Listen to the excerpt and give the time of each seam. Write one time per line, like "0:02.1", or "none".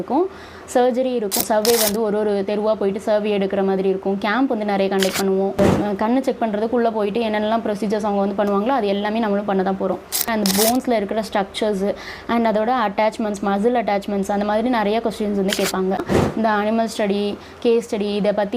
0:01.4
0:05.6
0:10.3
0:16.2